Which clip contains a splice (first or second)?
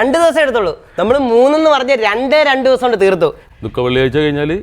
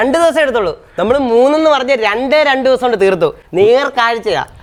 first